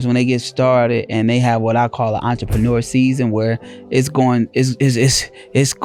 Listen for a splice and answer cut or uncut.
uncut